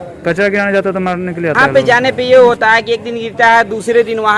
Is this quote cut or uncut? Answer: cut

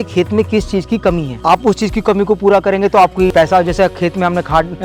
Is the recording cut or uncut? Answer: uncut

